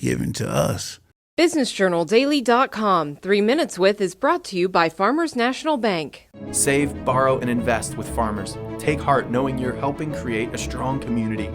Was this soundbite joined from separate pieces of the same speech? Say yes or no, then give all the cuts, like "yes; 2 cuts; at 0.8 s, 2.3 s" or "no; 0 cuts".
yes; 1 cut; at 1.2 s